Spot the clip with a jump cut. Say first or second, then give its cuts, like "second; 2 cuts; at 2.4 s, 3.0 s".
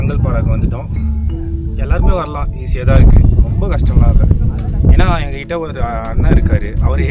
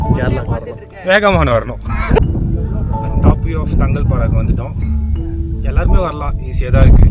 second; 1 cut; at 2.2 s